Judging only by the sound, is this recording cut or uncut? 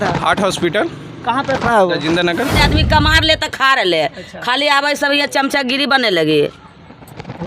cut